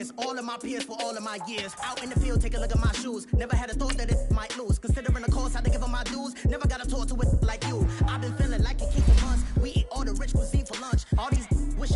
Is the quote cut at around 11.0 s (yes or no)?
no